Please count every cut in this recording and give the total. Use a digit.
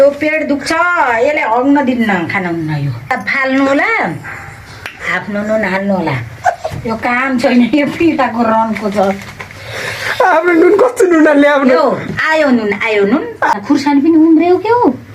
2